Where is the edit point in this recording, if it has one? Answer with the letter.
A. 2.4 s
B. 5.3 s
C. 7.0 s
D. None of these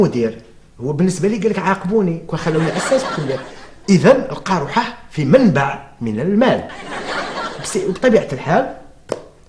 D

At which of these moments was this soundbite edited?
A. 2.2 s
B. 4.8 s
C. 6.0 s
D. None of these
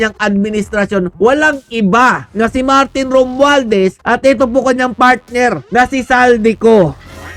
A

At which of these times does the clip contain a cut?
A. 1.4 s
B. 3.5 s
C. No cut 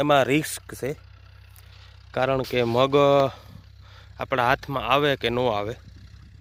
C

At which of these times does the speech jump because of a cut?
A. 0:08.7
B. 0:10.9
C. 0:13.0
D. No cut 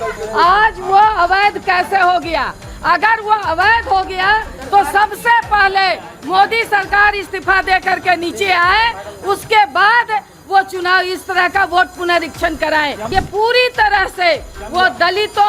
C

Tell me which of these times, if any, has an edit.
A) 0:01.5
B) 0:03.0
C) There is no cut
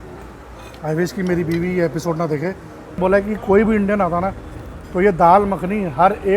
B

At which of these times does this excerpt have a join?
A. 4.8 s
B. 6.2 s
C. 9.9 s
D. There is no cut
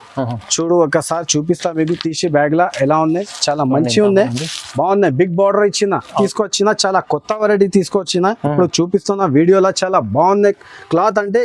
B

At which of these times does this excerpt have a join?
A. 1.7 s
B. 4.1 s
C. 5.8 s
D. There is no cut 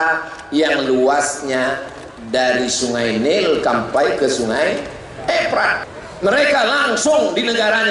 C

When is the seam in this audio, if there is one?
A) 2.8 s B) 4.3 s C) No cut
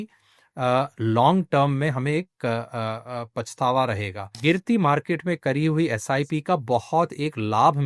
B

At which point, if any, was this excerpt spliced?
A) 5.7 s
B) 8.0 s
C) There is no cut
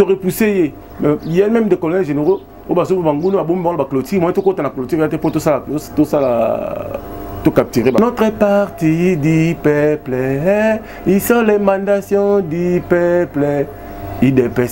B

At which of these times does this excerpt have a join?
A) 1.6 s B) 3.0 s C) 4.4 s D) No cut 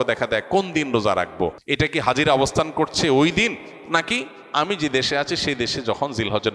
A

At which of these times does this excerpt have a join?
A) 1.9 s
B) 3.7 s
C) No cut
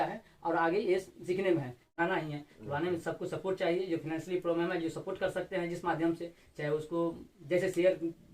A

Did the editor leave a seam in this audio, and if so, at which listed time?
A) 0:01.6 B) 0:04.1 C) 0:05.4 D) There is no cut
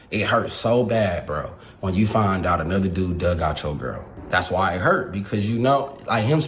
B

